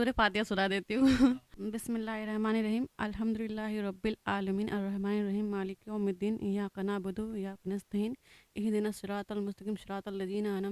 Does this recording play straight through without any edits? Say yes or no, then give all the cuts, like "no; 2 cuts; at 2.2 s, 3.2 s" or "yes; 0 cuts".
no; 1 cut; at 1.5 s